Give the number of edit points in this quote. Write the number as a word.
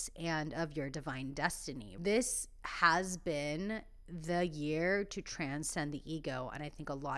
one